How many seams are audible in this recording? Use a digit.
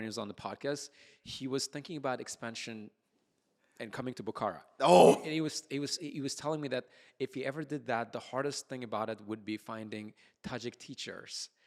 0